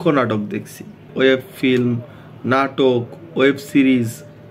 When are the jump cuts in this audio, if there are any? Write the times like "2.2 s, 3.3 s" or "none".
none